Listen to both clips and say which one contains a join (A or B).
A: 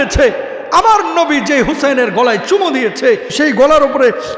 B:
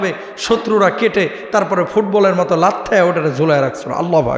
A